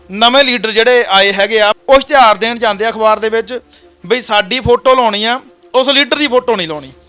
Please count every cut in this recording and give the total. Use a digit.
1